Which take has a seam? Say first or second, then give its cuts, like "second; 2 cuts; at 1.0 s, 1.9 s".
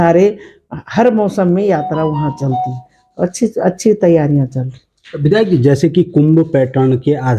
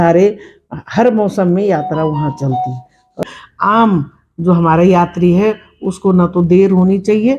second; 1 cut; at 3.3 s